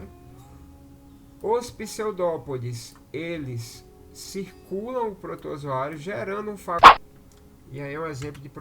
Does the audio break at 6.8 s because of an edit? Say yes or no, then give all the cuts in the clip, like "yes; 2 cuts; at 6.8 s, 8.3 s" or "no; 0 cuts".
yes; 1 cut; at 6.8 s